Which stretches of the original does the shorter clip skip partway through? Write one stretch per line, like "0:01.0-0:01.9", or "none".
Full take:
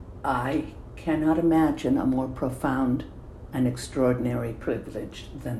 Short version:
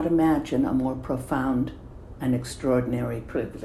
none